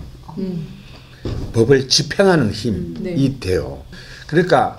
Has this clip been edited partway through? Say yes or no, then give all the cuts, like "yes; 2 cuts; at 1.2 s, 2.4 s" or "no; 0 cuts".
yes; 1 cut; at 3.9 s